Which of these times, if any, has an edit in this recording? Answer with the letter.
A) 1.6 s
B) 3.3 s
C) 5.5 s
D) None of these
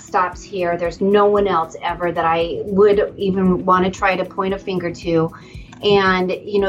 D